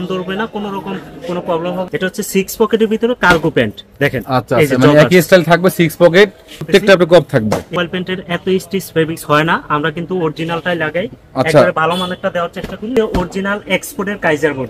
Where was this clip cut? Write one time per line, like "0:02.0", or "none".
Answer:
0:01.9
0:06.7
0:07.7
0:12.9